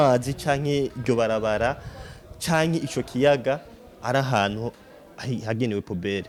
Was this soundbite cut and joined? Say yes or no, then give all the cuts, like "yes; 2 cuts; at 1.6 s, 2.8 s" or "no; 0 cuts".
no; 0 cuts